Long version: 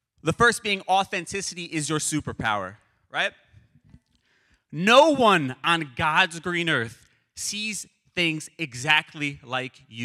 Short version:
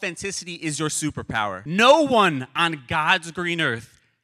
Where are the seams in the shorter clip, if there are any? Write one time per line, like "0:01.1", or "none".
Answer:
0:01.6

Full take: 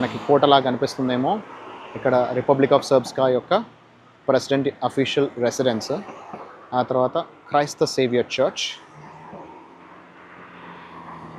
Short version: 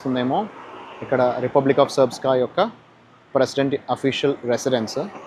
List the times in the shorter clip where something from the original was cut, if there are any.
none

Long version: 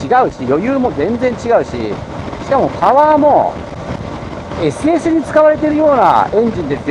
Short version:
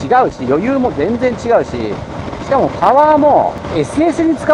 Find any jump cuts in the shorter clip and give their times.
0:03.6

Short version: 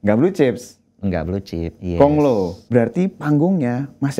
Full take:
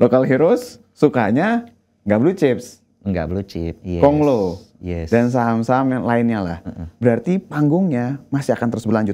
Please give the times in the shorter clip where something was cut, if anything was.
0:02.6

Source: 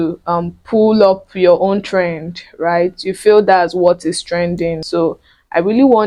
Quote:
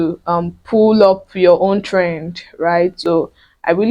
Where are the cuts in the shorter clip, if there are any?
0:03.0

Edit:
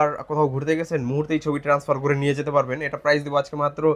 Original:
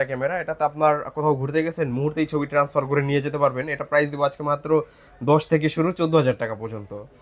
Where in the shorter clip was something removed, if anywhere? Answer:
none

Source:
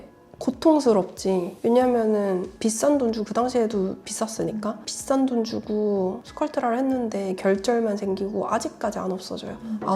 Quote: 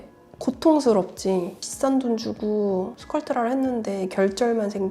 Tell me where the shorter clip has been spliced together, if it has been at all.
0:01.5

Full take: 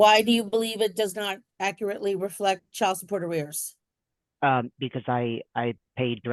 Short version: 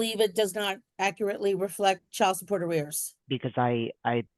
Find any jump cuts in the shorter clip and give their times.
0:03.3

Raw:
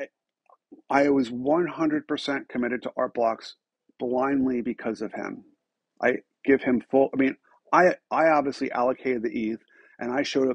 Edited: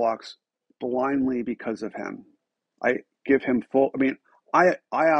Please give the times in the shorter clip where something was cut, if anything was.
none

